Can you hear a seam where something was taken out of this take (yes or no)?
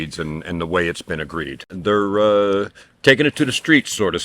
yes